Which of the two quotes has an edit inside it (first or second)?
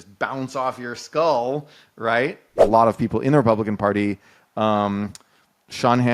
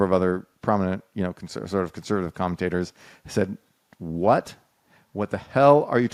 first